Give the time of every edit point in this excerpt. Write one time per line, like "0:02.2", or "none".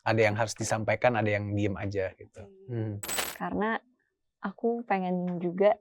0:03.1